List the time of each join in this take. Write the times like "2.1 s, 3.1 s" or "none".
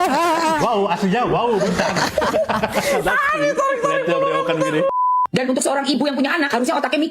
4.9 s